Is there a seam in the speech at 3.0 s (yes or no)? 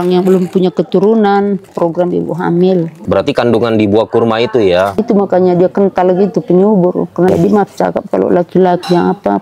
yes